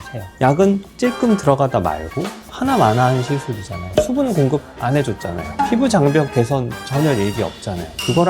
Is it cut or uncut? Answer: cut